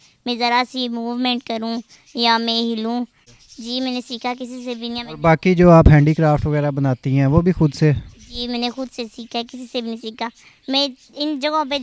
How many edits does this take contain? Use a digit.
1